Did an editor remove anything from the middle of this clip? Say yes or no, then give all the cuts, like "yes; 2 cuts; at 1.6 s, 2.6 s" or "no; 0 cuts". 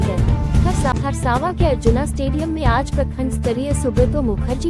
yes; 1 cut; at 0.9 s